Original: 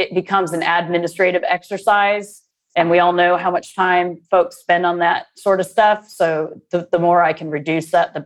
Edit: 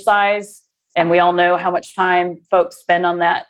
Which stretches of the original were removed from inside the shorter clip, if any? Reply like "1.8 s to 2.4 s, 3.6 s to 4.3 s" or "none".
none